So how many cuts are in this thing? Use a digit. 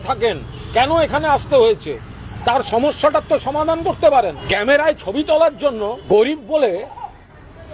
2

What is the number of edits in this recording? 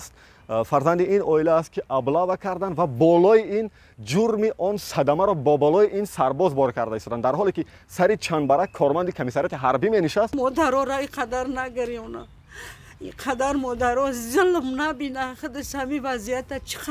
1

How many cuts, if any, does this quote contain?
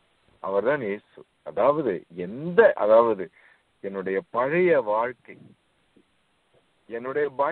0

